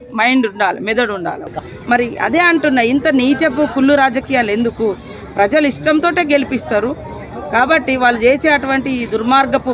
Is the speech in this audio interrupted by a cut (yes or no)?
yes